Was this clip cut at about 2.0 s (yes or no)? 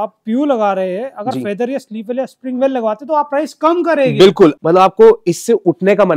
no